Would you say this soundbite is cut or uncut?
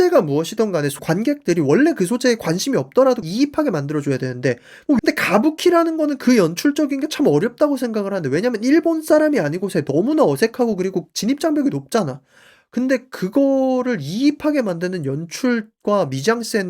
cut